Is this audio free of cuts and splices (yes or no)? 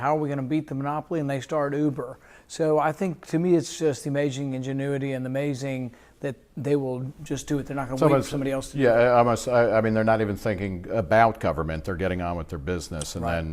no